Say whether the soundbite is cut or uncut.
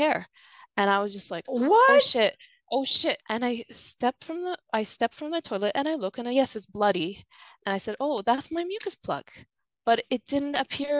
cut